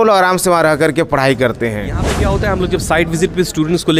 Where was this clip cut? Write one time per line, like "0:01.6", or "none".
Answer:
0:02.2